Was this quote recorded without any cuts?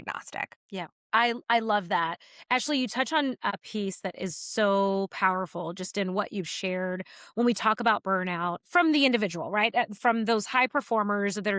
no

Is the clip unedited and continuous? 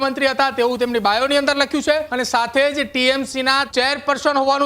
no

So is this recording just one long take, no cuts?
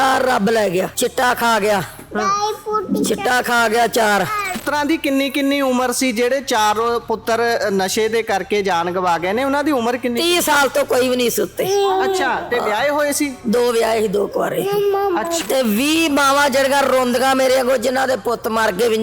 no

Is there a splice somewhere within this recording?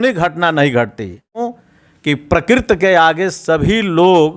yes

